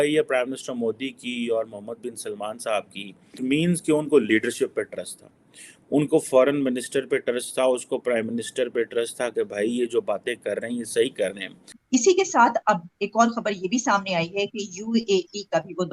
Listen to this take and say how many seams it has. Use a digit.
2